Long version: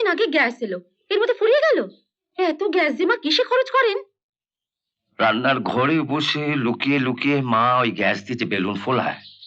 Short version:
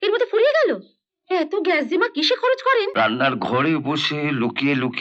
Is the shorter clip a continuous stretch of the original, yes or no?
no